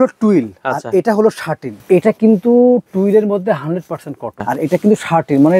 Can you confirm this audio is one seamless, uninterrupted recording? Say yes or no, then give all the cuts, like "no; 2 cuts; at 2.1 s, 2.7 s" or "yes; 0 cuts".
no; 2 cuts; at 1.8 s, 4.4 s